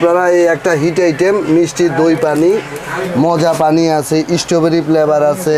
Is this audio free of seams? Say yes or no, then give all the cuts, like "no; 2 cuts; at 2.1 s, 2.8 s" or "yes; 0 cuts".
no; 1 cut; at 3.0 s